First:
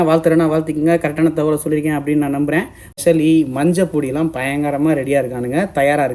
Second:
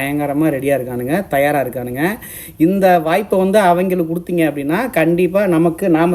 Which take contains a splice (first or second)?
first